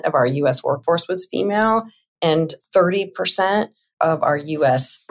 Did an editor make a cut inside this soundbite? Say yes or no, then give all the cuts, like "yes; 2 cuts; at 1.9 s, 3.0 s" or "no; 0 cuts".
no; 0 cuts